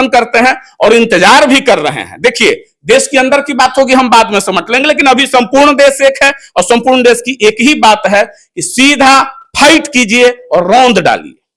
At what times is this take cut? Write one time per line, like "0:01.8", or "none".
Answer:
none